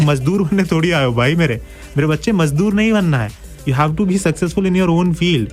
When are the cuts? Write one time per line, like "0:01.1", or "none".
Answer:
none